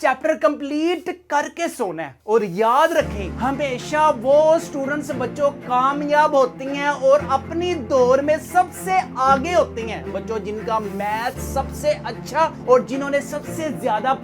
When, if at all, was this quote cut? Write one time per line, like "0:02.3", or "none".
none